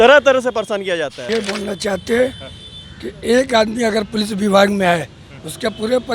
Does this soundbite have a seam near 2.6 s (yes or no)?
no